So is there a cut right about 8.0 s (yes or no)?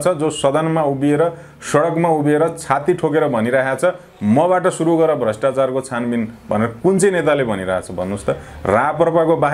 no